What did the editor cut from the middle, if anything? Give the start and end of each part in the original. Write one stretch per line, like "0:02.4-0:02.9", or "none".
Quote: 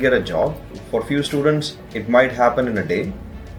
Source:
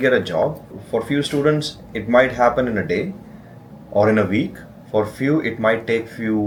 none